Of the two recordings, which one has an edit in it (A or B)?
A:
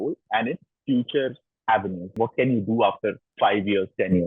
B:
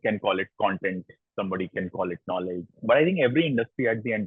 A